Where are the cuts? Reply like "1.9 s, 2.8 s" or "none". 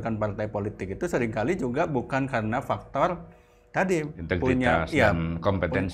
none